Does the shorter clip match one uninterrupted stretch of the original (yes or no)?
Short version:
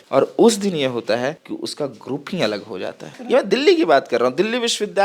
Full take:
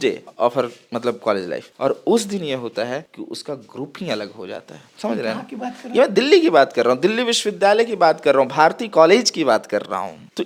no